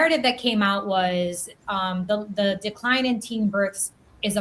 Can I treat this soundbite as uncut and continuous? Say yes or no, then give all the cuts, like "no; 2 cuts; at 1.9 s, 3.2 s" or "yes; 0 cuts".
yes; 0 cuts